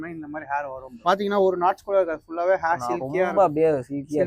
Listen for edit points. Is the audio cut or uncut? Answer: cut